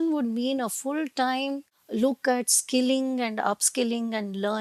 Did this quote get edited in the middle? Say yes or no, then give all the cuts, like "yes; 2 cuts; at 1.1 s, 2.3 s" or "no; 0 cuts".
no; 0 cuts